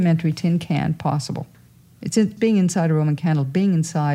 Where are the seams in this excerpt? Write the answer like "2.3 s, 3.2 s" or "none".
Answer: 1.6 s